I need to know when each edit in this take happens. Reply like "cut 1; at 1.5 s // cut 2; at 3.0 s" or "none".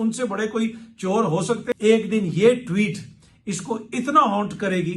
cut 1; at 1.7 s